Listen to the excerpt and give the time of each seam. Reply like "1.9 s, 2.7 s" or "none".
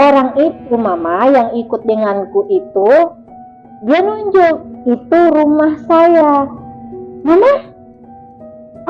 none